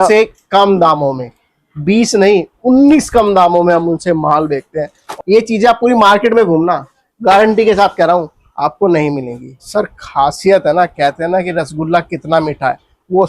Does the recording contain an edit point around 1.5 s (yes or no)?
no